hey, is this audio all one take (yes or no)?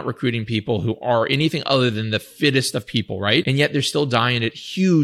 no